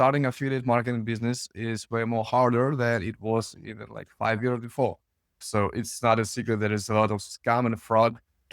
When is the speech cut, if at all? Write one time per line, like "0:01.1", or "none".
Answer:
0:05.3